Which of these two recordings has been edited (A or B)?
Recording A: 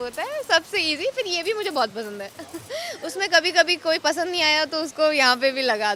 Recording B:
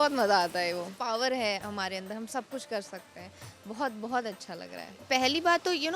B